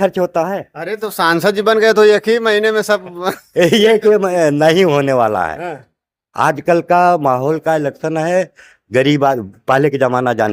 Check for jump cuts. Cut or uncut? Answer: uncut